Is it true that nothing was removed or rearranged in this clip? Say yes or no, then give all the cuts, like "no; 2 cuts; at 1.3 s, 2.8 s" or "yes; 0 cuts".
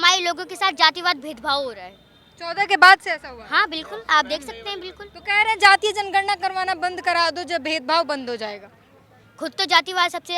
yes; 0 cuts